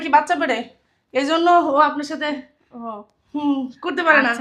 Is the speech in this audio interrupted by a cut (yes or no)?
no